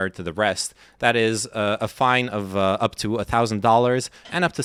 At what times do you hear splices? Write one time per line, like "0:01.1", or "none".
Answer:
none